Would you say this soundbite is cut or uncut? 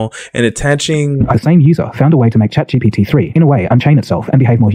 cut